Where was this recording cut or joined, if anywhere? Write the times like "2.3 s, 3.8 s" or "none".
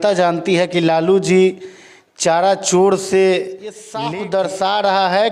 3.9 s